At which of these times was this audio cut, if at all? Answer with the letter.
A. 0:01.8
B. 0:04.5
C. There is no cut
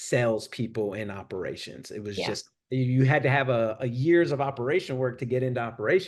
C